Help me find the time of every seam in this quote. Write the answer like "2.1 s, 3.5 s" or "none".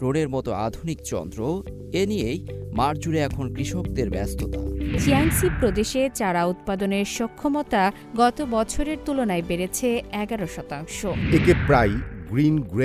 5.0 s, 11.2 s